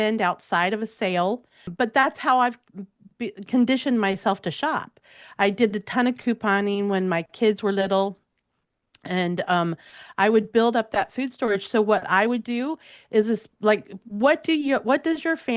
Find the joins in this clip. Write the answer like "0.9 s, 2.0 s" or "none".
1.7 s